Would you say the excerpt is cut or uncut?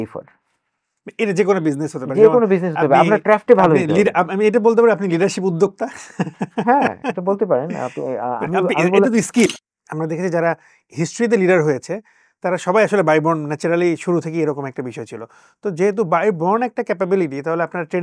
cut